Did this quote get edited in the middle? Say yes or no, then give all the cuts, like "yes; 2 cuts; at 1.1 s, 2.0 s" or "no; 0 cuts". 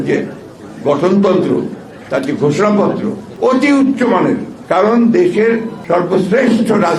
yes; 3 cuts; at 3.2 s, 4.5 s, 5.7 s